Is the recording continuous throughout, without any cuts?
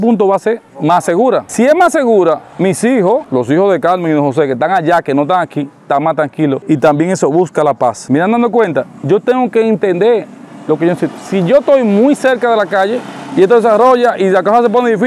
yes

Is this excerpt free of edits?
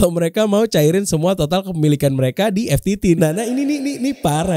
no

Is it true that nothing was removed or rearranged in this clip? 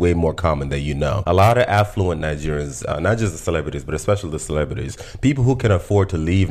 yes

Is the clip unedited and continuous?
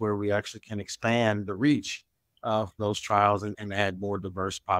yes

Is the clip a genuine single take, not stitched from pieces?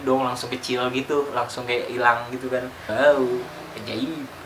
no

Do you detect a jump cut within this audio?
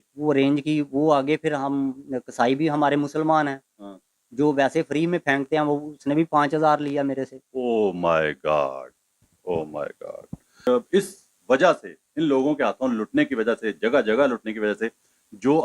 yes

